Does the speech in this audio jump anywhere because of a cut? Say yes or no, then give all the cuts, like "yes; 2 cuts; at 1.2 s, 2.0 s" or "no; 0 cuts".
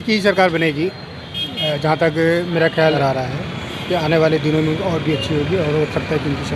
yes; 1 cut; at 2.9 s